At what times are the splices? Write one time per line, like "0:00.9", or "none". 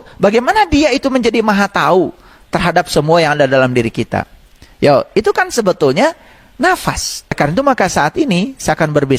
0:07.4